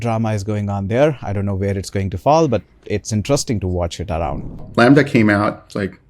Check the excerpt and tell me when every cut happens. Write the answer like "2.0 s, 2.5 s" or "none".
4.6 s